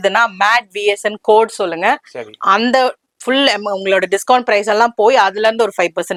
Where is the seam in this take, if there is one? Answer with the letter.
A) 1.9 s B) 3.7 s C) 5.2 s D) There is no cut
D